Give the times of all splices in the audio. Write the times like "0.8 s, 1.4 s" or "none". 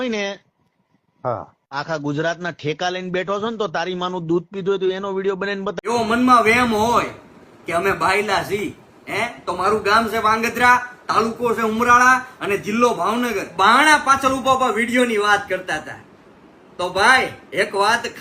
5.8 s, 13.4 s